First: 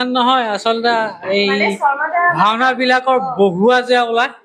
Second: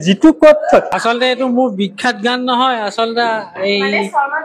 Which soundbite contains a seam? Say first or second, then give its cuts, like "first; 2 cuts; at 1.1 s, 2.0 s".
second; 1 cut; at 1.0 s